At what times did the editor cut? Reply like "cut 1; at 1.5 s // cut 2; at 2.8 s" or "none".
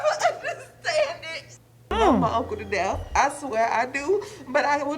cut 1; at 1.9 s

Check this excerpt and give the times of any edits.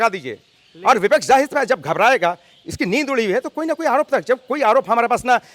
none

